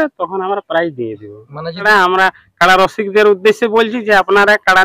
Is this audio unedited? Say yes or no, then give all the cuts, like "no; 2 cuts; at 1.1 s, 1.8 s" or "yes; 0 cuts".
no; 1 cut; at 1.9 s